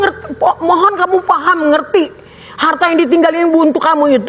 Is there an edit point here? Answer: no; 0 cuts

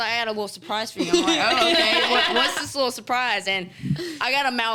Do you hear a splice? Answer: no; 0 cuts

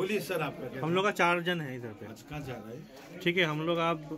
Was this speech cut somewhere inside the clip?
no; 0 cuts

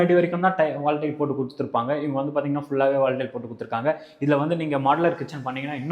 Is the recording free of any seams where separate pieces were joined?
yes; 0 cuts

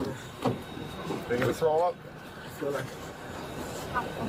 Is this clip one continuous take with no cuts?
yes; 0 cuts

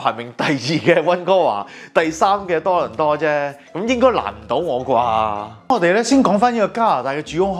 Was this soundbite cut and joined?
no; 0 cuts

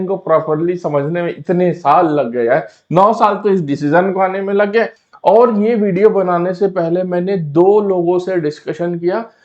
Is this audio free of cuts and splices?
no; 1 cut; at 5.0 s

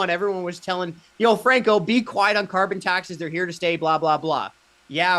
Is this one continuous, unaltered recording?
yes; 0 cuts

